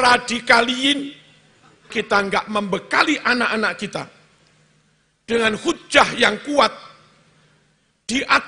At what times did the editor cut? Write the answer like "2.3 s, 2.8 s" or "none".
1.9 s